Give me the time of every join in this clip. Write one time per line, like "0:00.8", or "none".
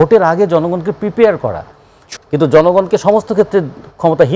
0:02.0